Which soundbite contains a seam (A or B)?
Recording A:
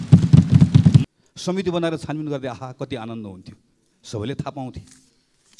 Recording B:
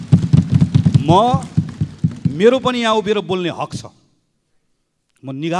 A